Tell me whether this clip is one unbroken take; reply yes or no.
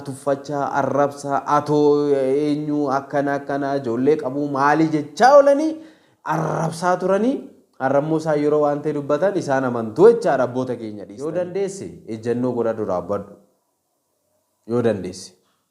no